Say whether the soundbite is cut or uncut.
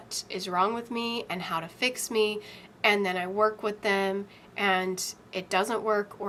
uncut